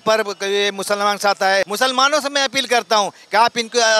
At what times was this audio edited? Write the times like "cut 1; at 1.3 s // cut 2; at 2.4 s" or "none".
cut 1; at 1.7 s